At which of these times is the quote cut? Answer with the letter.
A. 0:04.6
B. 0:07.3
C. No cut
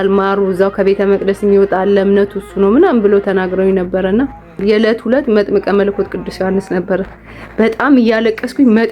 A